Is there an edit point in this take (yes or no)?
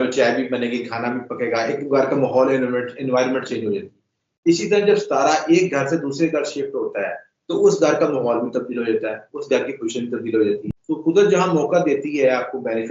yes